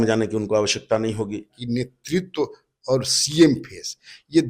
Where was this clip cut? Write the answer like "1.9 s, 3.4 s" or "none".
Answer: 1.6 s